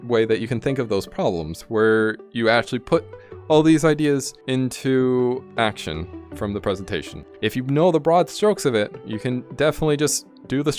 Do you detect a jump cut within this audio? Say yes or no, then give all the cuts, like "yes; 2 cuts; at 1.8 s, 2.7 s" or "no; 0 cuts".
yes; 4 cuts; at 1.6 s, 4.4 s, 5.5 s, 7.3 s